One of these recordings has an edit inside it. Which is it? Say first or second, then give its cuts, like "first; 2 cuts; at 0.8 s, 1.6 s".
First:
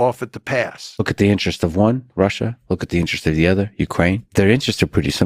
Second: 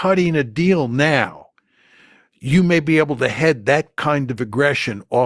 first; 2 cuts; at 1.0 s, 4.2 s